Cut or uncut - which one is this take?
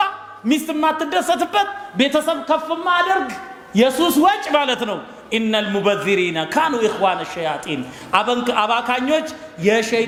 uncut